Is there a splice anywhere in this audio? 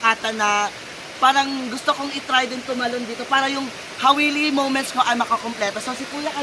no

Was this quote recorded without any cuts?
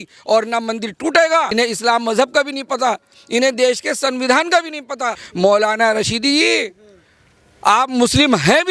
no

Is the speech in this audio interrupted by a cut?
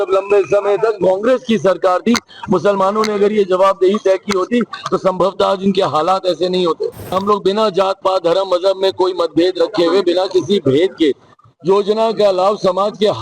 yes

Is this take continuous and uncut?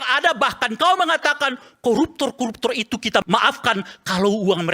no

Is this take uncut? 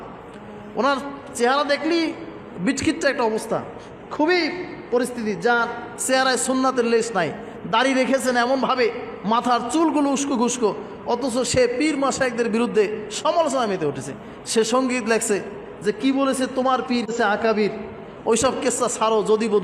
yes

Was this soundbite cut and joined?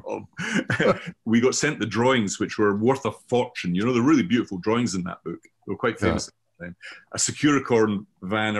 yes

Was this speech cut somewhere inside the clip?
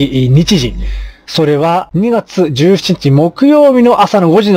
no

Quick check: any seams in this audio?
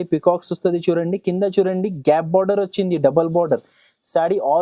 no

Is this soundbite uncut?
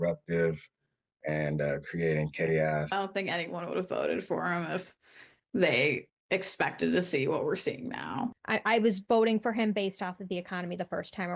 yes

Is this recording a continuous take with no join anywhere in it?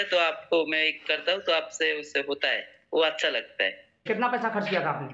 no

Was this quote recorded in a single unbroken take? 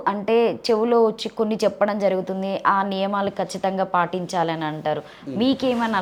yes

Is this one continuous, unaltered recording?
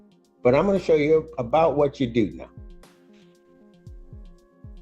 no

